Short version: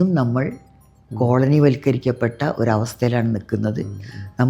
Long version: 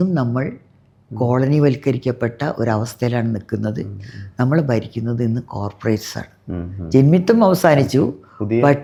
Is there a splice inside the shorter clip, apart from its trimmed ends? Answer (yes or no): no